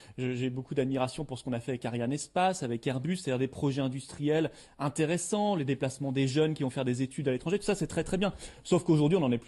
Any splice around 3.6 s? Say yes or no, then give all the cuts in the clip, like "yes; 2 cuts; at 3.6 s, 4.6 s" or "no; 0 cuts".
no; 1 cut; at 5.2 s